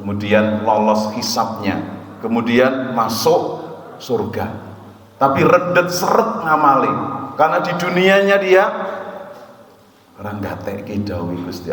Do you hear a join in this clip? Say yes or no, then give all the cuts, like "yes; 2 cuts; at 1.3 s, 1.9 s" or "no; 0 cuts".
no; 0 cuts